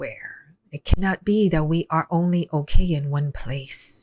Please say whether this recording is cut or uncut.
uncut